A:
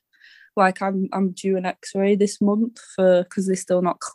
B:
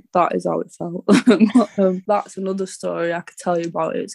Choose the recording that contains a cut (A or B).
B